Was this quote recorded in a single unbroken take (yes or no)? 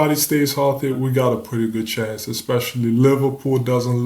no